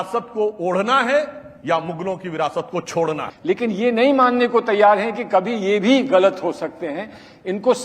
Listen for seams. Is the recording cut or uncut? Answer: cut